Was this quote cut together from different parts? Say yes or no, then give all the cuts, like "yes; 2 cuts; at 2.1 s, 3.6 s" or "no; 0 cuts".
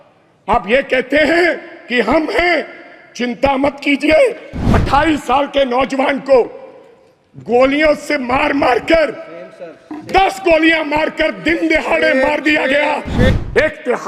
yes; 2 cuts; at 4.7 s, 13.3 s